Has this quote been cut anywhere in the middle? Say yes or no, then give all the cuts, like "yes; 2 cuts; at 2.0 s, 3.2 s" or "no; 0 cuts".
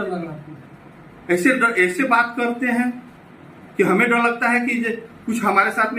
no; 0 cuts